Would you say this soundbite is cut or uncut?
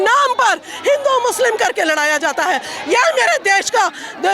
uncut